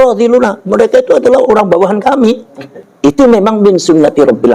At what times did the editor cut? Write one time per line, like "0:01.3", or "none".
0:03.2

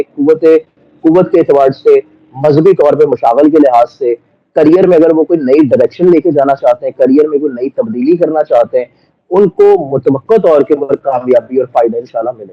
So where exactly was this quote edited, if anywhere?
none

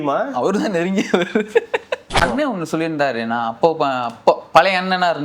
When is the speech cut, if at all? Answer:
0:02.2

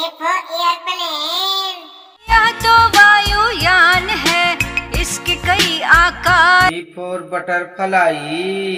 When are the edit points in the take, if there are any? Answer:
none

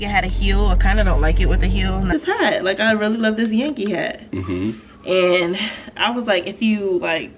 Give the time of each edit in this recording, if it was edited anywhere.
0:02.1

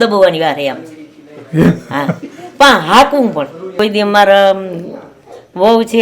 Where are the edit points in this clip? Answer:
0:03.7

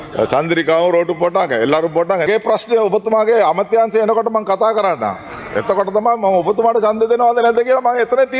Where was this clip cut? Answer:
0:02.3

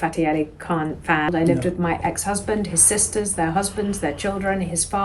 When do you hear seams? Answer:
0:01.3

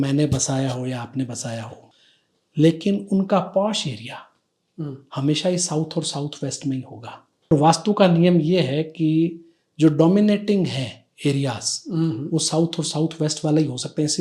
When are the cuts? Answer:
0:01.8
0:07.5

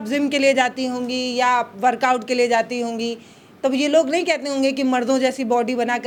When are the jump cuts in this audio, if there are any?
none

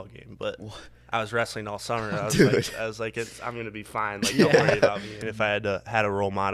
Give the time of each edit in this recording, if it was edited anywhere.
0:05.3

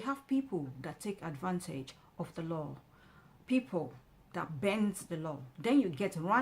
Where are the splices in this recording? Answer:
none

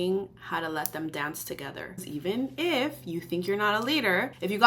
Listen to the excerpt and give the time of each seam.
0:02.1

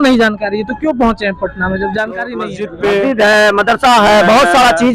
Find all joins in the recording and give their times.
0:02.6

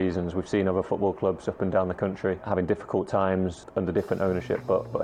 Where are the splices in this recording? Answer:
0:02.5
0:03.6

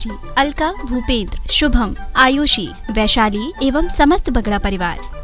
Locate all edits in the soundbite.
none

